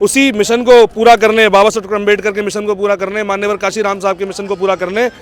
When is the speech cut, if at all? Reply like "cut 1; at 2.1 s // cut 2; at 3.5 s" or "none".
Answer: none